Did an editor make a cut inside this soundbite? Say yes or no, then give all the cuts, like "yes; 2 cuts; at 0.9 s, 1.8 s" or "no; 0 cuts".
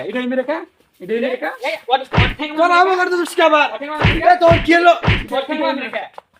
no; 0 cuts